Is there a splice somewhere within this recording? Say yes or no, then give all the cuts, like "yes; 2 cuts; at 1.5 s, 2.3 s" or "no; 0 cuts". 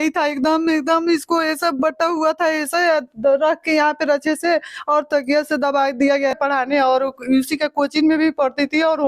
yes; 1 cut; at 6.4 s